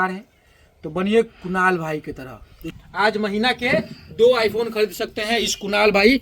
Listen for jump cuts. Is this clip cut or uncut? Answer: cut